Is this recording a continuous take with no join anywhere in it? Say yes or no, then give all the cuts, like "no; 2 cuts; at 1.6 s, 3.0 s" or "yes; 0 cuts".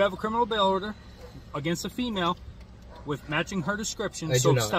yes; 0 cuts